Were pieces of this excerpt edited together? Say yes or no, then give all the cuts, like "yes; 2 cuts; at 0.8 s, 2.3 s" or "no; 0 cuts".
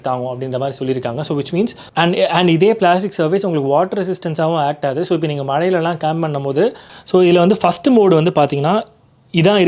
yes; 2 cuts; at 1.8 s, 6.9 s